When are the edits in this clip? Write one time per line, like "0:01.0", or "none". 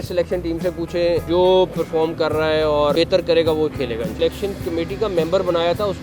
0:01.2
0:02.9
0:04.2